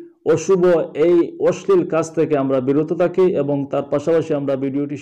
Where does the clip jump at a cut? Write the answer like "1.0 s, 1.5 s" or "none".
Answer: none

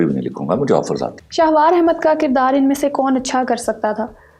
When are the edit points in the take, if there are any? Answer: 1.2 s

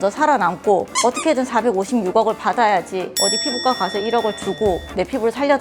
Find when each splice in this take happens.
none

